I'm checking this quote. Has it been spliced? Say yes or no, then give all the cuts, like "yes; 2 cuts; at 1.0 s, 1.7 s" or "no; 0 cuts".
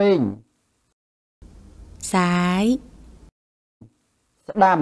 no; 0 cuts